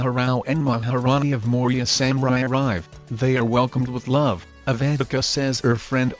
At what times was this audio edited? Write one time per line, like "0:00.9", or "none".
none